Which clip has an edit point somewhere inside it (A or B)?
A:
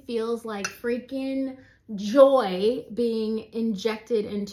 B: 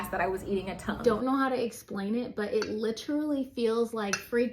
B